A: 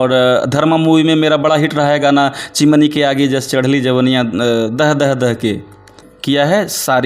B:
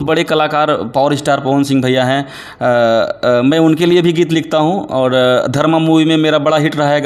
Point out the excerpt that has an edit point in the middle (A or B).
A